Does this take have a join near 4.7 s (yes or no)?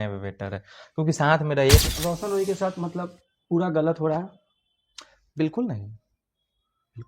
no